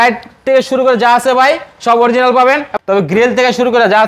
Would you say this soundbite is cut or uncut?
cut